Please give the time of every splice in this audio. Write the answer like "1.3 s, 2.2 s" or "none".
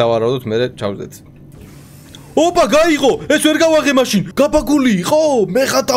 4.3 s